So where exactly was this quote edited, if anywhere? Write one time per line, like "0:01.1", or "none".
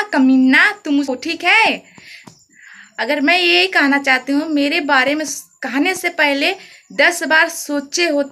0:01.1

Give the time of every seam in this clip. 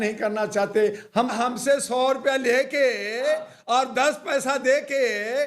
0:01.3

